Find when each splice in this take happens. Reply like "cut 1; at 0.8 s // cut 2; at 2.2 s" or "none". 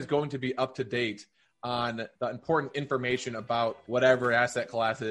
cut 1; at 3.8 s